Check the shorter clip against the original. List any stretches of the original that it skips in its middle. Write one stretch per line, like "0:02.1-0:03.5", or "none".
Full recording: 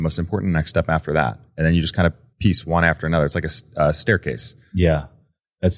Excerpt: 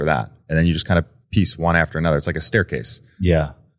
0:03.5-0:04.0